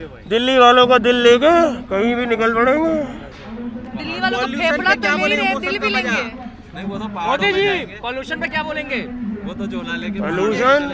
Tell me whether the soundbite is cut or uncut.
uncut